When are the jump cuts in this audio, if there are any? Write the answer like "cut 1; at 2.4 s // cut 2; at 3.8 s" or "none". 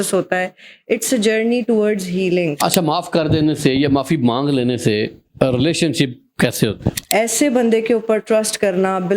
cut 1; at 2.6 s // cut 2; at 7.0 s